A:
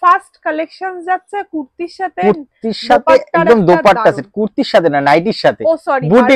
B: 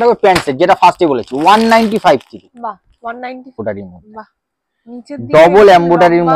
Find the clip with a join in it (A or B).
B